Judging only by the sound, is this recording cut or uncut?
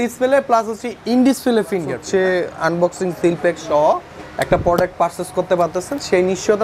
cut